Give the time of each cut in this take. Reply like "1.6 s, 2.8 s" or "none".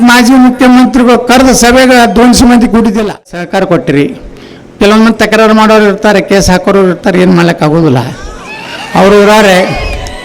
3.5 s